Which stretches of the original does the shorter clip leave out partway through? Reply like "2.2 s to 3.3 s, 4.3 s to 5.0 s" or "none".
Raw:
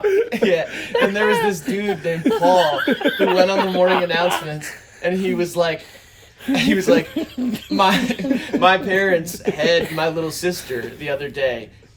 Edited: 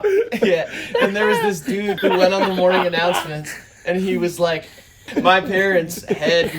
2.0 s to 3.1 s, 6.2 s to 8.4 s